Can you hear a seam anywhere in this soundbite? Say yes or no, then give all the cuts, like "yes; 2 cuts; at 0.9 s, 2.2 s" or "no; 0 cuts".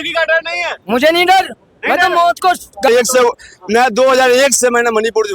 yes; 1 cut; at 2.9 s